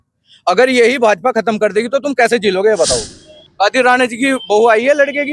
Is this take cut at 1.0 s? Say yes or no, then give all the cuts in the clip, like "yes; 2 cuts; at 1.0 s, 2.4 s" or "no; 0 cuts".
no; 1 cut; at 3.4 s